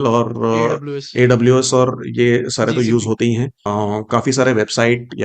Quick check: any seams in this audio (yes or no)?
yes